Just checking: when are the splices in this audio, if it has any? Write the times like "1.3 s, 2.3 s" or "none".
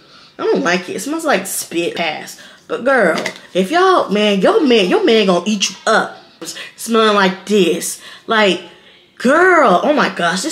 1.9 s, 6.4 s

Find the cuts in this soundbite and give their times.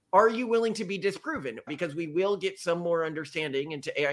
1.7 s

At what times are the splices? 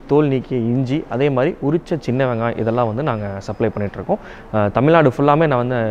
none

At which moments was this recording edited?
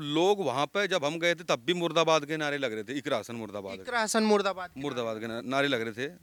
none

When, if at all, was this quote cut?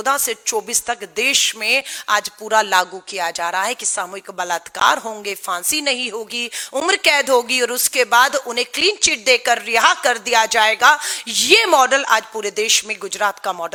none

